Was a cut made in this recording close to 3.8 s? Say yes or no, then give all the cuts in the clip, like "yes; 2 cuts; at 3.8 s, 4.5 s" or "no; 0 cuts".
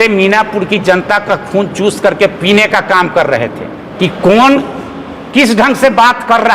yes; 1 cut; at 3.8 s